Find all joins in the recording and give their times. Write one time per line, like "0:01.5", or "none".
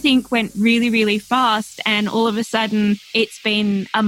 0:03.1